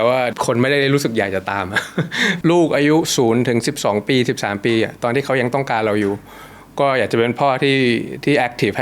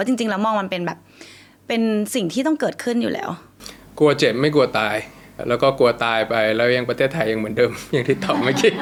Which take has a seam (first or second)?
first